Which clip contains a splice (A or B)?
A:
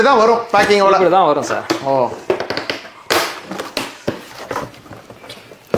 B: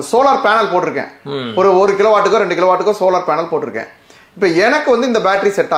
A